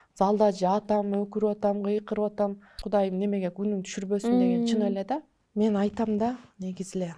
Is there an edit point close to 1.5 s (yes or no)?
no